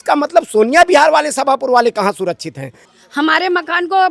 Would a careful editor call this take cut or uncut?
cut